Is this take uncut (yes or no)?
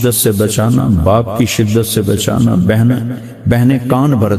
yes